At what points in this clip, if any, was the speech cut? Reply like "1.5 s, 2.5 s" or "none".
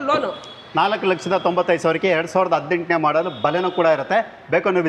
none